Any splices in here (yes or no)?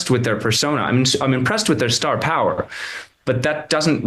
no